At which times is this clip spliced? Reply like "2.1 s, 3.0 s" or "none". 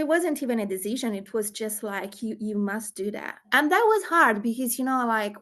3.4 s